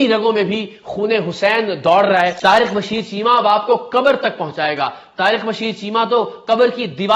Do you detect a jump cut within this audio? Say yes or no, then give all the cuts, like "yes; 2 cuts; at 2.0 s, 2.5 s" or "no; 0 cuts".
yes; 1 cut; at 2.4 s